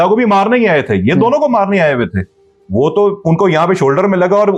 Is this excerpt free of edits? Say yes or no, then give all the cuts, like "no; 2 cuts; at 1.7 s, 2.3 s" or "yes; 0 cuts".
yes; 0 cuts